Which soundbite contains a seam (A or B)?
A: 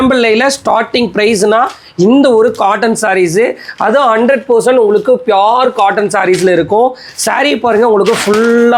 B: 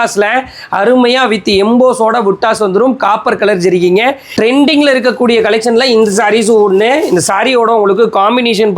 B